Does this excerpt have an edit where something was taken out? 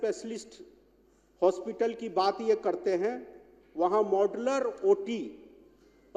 no; 0 cuts

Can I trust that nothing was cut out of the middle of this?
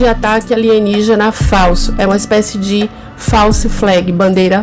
yes; 0 cuts

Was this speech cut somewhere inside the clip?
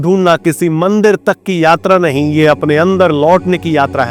no; 0 cuts

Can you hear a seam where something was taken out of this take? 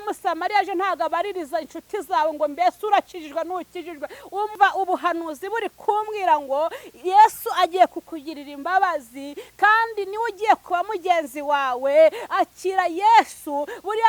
yes; 1 cut; at 4.5 s

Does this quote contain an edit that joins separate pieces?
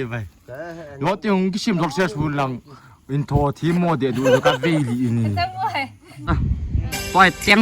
yes; 1 cut; at 6.3 s

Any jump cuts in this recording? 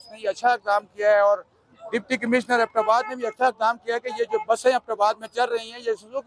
no; 0 cuts

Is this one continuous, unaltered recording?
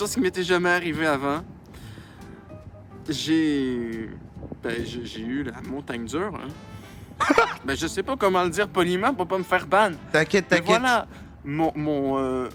yes; 0 cuts

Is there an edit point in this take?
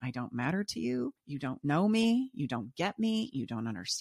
yes; 1 cut; at 1.2 s

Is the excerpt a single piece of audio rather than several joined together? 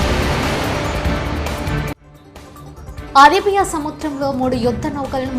no; 1 cut; at 3.1 s

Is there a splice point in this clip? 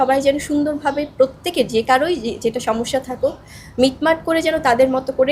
no; 0 cuts

